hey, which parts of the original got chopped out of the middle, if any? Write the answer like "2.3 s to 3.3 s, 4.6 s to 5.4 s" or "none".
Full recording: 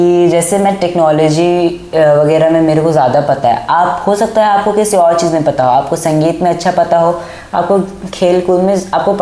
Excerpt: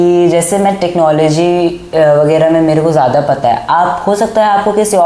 none